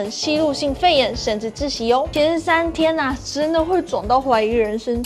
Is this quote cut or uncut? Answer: cut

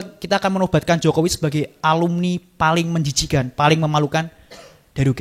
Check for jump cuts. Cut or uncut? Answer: uncut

